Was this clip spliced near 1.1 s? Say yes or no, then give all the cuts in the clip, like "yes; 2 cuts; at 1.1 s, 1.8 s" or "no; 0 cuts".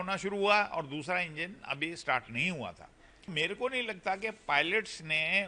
no; 1 cut; at 3.3 s